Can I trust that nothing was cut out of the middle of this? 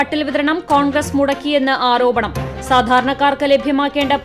yes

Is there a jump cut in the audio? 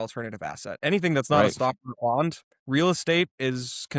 no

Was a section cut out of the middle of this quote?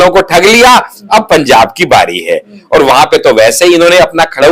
no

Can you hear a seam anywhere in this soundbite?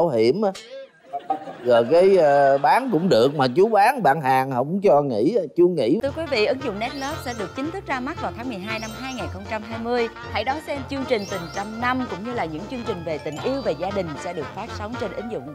yes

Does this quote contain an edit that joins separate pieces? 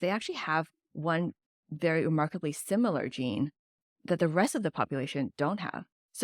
yes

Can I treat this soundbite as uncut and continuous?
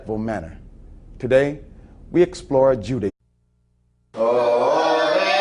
yes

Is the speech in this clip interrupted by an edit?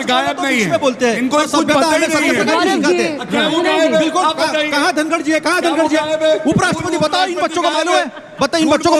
no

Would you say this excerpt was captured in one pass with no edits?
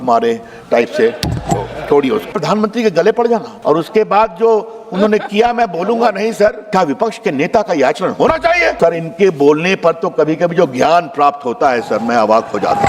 no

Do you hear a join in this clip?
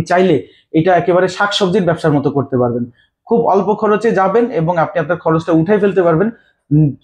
no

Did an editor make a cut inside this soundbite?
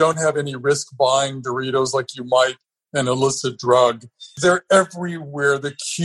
yes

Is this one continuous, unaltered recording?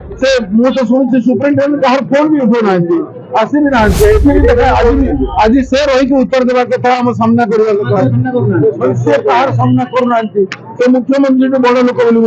yes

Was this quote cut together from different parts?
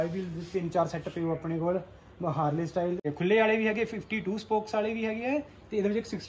no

